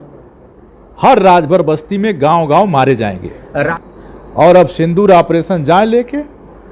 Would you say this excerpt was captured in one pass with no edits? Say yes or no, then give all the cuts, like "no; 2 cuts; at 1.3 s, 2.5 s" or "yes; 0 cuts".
no; 1 cut; at 3.7 s